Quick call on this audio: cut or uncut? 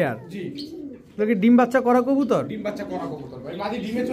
uncut